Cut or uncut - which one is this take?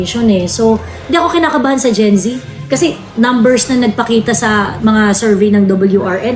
uncut